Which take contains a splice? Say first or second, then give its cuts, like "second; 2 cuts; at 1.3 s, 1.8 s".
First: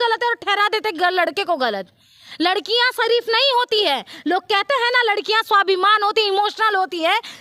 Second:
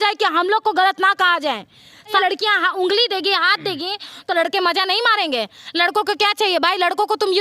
second; 1 cut; at 2.2 s